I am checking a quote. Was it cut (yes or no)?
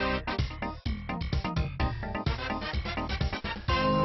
yes